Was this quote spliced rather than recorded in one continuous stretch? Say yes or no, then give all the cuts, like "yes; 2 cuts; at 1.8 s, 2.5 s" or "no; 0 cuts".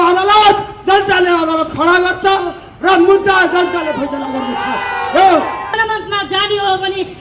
yes; 1 cut; at 5.6 s